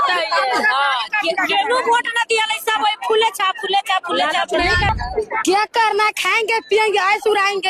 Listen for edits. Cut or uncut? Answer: cut